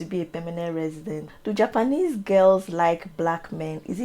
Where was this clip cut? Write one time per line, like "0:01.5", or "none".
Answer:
0:01.3